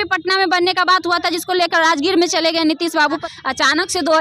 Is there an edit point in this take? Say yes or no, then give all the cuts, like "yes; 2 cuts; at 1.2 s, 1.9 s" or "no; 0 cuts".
yes; 1 cut; at 3.2 s